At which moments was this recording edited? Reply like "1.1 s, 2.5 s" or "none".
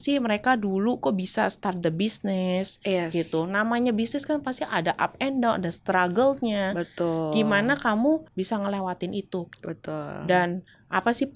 8.3 s